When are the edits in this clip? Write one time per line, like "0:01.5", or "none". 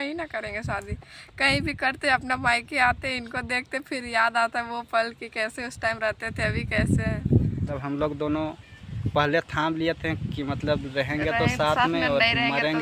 0:07.8